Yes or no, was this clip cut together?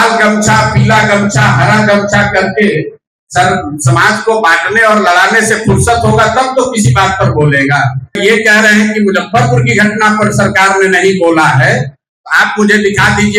yes